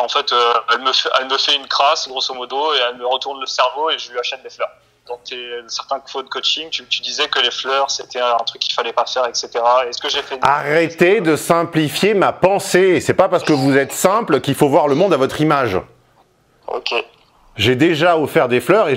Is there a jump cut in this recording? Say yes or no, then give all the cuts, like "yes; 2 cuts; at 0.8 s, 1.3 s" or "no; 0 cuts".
yes; 1 cut; at 5.0 s